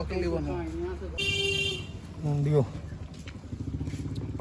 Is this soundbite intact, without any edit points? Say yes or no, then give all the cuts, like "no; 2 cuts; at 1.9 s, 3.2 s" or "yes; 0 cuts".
no; 1 cut; at 1.2 s